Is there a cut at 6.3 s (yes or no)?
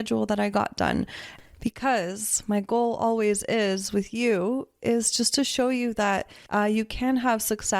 yes